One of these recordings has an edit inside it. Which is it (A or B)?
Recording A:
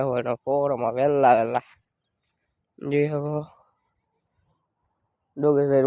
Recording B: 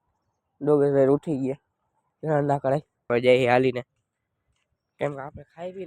B